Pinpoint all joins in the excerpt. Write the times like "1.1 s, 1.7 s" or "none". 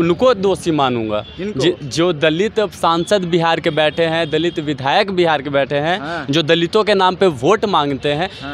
none